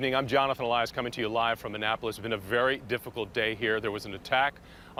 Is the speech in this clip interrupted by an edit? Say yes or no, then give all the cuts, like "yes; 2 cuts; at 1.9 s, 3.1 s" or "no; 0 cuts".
no; 0 cuts